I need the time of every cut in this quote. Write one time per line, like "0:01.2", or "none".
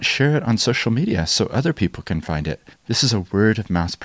0:02.8